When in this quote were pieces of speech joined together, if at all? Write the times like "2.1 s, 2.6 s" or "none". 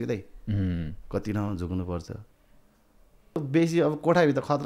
3.4 s